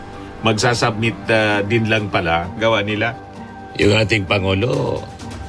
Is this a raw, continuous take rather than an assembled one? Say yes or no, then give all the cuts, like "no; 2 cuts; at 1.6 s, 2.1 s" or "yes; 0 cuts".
no; 1 cut; at 2.6 s